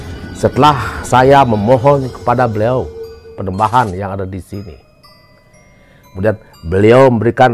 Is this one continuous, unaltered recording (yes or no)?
yes